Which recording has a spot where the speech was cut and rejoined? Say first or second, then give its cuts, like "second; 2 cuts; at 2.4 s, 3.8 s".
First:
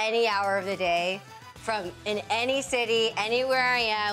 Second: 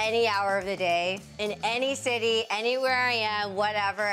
second; 1 cut; at 1.3 s